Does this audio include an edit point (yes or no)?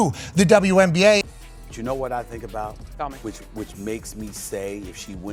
yes